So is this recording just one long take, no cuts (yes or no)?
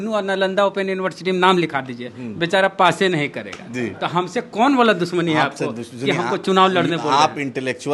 yes